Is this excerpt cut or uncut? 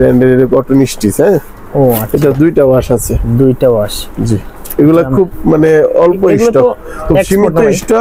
uncut